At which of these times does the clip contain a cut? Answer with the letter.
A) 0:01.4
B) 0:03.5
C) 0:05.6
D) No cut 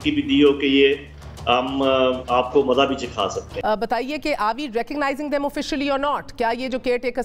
B